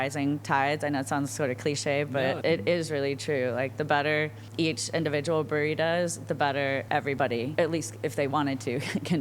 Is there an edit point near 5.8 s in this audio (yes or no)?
no